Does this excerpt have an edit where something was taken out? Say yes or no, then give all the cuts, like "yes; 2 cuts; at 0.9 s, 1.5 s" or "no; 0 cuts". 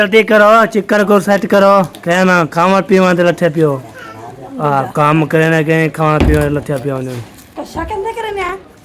yes; 1 cut; at 4.5 s